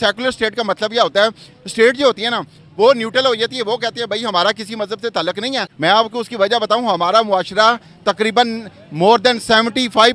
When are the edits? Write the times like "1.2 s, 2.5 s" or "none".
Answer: 5.7 s